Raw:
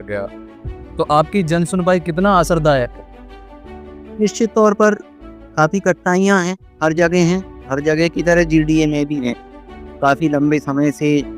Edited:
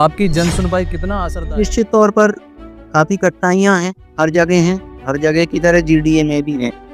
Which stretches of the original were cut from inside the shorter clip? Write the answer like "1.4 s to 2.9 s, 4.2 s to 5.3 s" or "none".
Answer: 2.2 s to 3.7 s